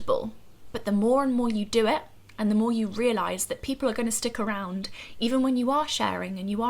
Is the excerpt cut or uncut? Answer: uncut